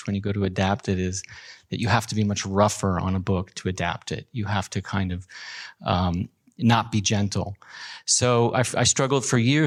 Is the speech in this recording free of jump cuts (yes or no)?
yes